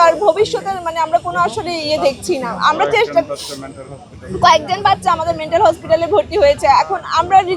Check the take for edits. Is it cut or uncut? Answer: uncut